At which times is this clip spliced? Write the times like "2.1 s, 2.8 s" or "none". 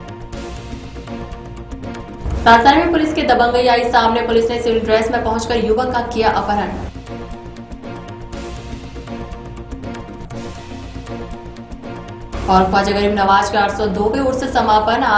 1.9 s